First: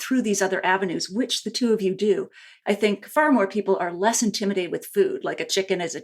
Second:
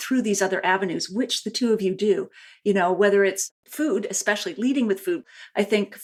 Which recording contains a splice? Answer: first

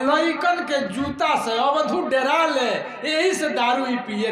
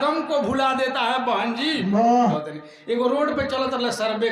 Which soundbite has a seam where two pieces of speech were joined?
second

